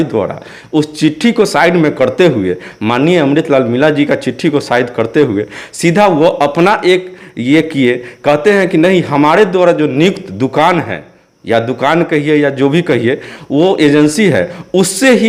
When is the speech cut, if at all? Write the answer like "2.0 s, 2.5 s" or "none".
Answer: none